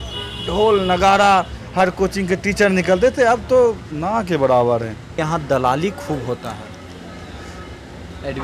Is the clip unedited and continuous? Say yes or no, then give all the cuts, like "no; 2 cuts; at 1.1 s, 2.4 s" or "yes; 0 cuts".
no; 1 cut; at 5.2 s